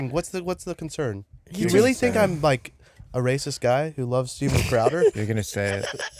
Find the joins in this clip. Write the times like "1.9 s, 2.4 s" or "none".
none